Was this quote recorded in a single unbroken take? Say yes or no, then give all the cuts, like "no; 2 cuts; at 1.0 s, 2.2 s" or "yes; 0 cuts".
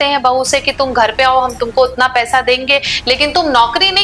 yes; 0 cuts